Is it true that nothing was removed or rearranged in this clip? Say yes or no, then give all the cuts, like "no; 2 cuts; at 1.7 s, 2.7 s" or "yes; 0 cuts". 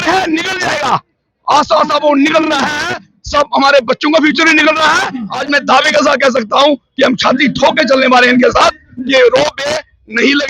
no; 1 cut; at 5.3 s